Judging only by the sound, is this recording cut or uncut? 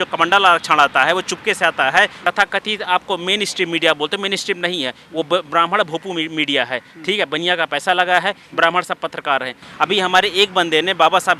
cut